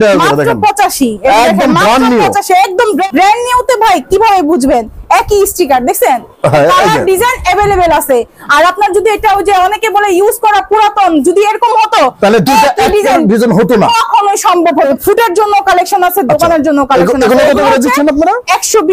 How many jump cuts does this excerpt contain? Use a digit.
2